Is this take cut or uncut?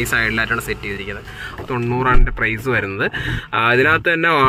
cut